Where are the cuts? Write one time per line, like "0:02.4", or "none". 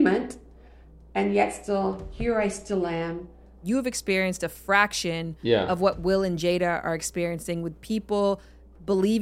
0:03.6